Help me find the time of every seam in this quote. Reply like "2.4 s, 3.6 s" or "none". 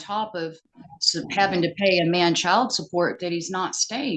none